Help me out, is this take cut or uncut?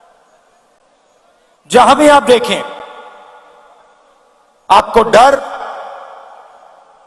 cut